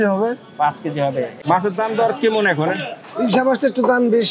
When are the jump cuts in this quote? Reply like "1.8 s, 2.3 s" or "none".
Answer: 1.4 s

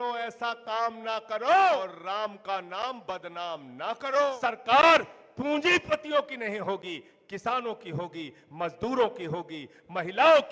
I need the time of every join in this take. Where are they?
1.9 s, 4.3 s

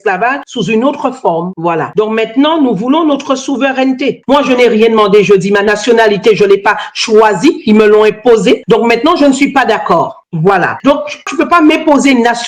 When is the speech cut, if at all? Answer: 4.2 s, 8.6 s

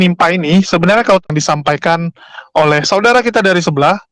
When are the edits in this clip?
1.2 s

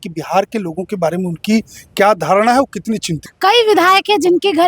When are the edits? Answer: 3.2 s

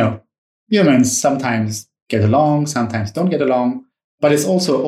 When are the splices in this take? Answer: none

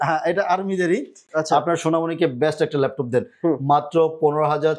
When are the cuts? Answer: 1.2 s

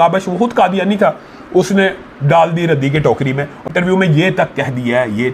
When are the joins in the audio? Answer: 3.5 s

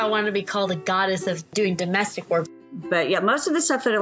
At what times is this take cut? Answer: 1.5 s, 2.6 s

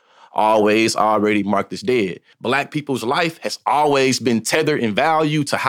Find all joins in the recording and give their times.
2.2 s

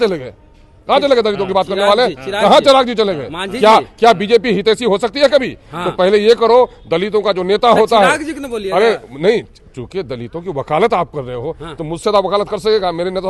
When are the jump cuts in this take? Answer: none

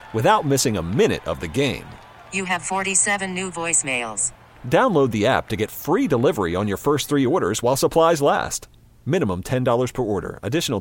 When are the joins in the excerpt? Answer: none

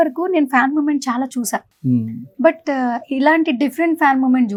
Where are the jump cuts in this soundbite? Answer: none

